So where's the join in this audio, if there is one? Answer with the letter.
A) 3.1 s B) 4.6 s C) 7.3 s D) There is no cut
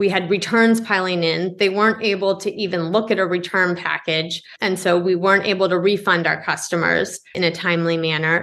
C